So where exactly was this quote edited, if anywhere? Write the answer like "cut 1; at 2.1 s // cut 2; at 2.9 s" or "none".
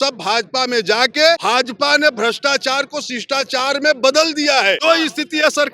cut 1; at 1.4 s // cut 2; at 4.8 s